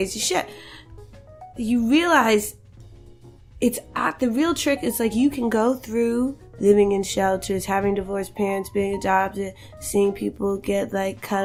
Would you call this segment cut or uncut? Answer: uncut